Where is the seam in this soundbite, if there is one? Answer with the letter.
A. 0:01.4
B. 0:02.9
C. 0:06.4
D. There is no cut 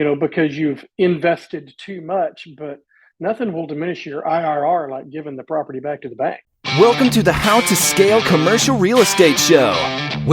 C